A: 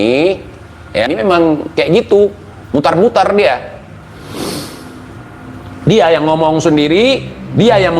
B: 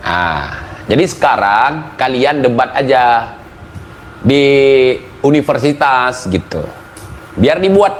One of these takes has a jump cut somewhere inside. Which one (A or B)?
A